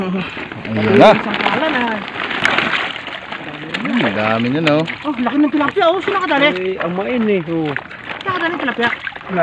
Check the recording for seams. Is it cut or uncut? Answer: uncut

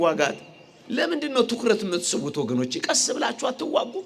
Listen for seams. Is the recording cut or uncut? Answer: uncut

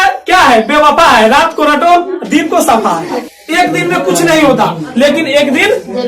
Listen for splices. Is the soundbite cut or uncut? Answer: cut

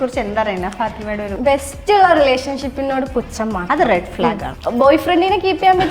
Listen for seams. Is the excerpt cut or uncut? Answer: cut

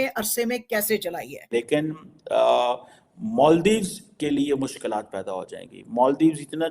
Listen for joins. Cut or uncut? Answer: cut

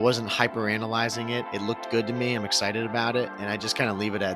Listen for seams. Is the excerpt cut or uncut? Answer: cut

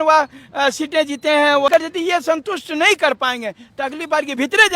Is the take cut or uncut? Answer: cut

